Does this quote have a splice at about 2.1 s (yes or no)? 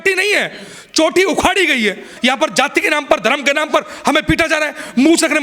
yes